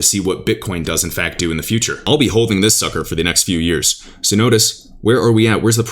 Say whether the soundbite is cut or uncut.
cut